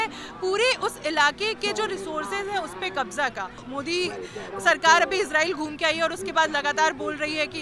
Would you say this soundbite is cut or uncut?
cut